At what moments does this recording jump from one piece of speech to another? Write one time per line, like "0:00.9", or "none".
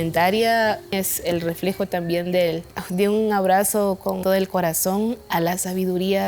0:02.7
0:04.2